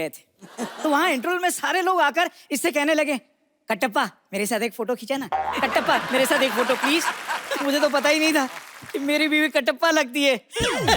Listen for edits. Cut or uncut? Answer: uncut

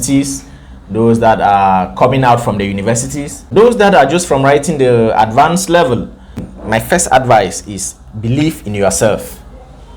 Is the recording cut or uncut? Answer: cut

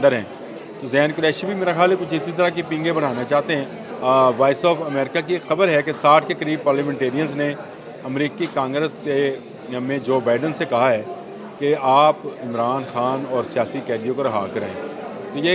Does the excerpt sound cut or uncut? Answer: cut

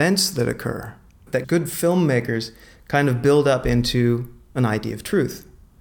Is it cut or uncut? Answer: cut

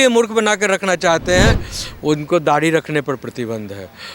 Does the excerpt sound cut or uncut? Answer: cut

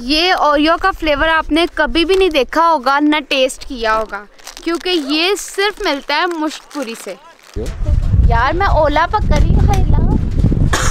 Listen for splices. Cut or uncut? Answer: cut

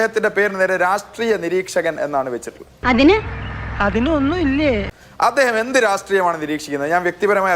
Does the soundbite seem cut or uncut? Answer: uncut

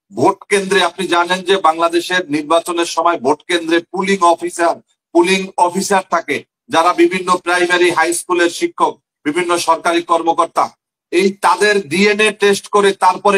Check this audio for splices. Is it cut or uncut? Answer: uncut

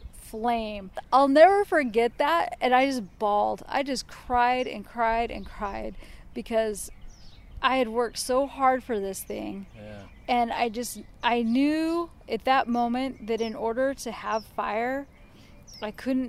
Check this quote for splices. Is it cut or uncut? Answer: cut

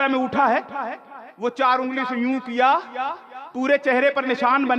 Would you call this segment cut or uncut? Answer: uncut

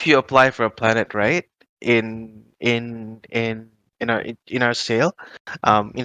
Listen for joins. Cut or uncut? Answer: uncut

